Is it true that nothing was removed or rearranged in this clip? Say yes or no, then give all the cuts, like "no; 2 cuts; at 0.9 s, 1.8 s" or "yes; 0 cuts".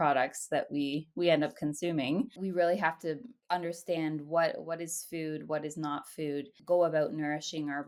yes; 0 cuts